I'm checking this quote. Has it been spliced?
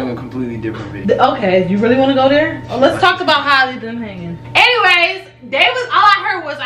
yes; 2 cuts; at 0.9 s, 4.4 s

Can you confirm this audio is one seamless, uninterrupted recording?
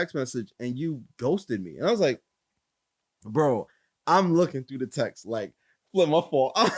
yes; 0 cuts

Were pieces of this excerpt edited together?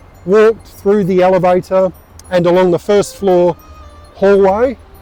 no; 0 cuts

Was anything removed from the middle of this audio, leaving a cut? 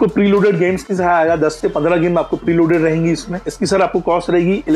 no; 0 cuts

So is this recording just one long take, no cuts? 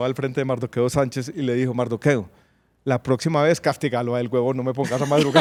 yes; 0 cuts

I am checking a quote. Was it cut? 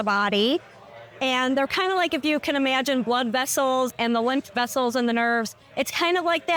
no; 0 cuts

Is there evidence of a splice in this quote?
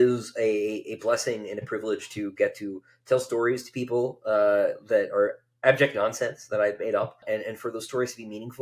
yes; 1 cut; at 7.2 s

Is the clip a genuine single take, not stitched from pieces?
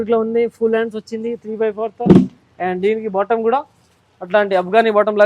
yes; 0 cuts

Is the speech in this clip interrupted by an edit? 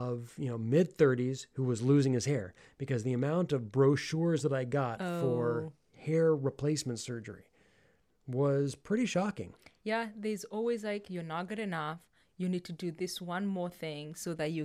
no; 0 cuts

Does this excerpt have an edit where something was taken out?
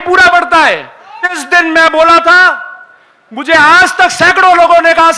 yes; 1 cut; at 1.4 s

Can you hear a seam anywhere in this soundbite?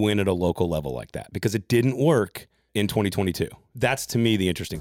yes; 2 cuts; at 2.7 s, 3.7 s

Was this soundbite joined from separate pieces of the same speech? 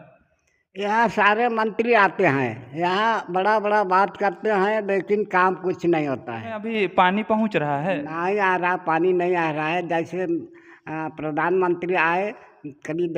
yes; 1 cut; at 6.7 s

